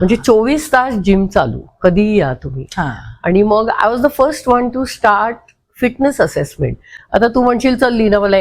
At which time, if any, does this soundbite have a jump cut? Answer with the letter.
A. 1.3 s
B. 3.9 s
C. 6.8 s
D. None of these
D